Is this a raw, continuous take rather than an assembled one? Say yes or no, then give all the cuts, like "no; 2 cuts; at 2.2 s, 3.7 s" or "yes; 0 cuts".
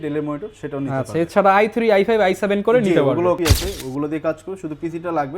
no; 1 cut; at 3.4 s